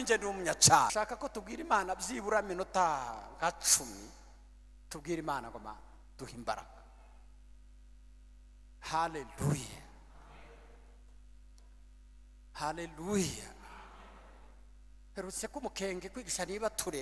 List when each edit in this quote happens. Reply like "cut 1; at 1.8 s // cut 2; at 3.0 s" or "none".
cut 1; at 0.9 s